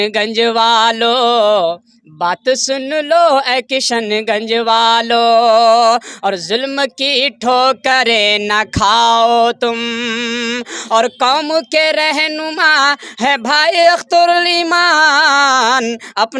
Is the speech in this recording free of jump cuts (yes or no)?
yes